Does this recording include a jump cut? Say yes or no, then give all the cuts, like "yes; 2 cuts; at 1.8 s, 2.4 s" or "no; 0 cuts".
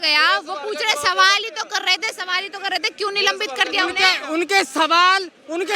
no; 0 cuts